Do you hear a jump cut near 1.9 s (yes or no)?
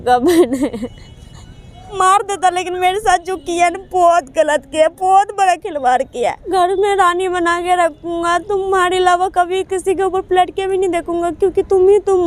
yes